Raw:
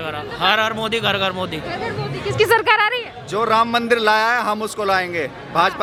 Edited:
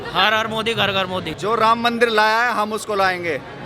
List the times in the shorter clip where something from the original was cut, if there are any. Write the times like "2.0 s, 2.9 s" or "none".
1.3 s